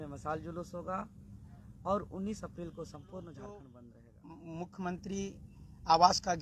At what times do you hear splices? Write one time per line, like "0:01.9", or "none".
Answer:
0:03.8

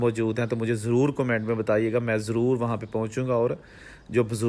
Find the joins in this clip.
none

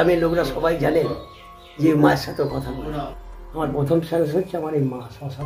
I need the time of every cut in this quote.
0:03.1

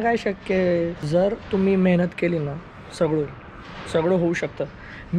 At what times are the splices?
0:00.9

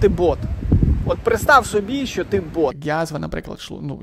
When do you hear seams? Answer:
0:02.8

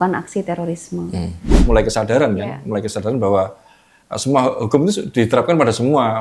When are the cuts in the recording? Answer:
0:01.5

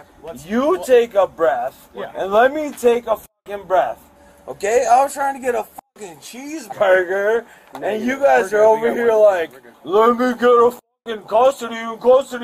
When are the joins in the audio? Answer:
0:09.7

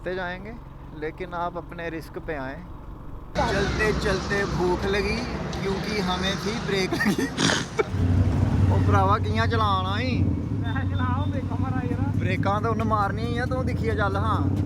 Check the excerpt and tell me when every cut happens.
0:03.3
0:07.9

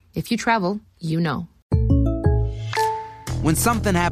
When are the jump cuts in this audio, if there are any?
0:01.5
0:03.2

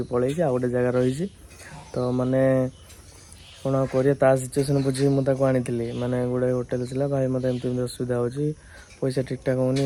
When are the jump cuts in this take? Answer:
none

